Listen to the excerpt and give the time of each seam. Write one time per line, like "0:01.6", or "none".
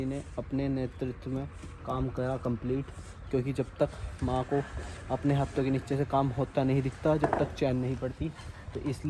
none